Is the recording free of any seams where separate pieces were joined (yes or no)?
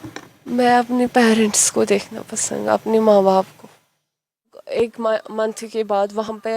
no